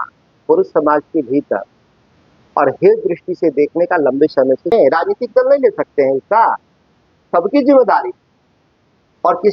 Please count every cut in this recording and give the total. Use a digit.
1